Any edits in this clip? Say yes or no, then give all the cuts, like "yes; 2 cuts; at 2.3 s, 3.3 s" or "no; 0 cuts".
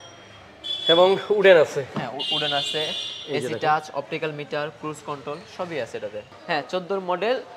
yes; 1 cut; at 6.3 s